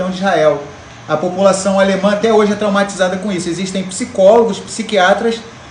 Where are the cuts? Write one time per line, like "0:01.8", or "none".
none